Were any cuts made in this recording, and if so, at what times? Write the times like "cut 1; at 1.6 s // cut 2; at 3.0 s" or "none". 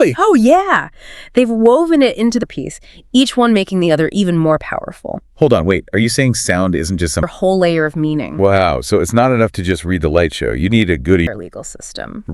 cut 1; at 2.4 s // cut 2; at 7.3 s // cut 3; at 11.3 s